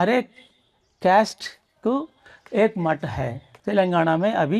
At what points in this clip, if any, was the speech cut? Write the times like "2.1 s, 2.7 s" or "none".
3.5 s